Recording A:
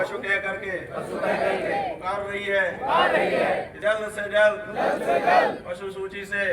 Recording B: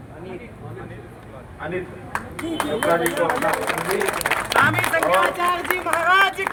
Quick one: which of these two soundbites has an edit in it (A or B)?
A